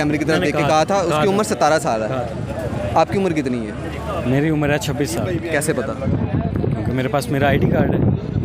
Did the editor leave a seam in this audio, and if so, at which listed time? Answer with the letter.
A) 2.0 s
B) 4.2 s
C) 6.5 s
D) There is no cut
D